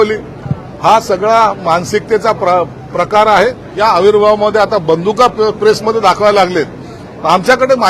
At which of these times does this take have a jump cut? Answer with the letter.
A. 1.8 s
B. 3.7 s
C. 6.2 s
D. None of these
B